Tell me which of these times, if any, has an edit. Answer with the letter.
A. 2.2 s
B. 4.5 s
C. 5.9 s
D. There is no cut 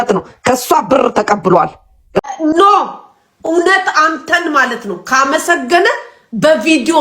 A